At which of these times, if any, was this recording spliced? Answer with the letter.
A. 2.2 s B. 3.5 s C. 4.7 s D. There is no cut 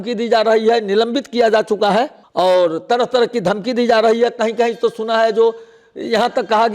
A